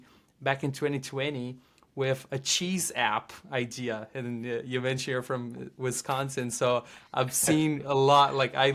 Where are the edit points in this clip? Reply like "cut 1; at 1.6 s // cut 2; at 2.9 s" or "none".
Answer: none